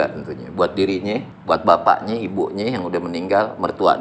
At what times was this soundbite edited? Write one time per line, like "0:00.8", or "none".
0:01.3